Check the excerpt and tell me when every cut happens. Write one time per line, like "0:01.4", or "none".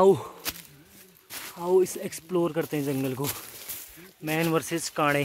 none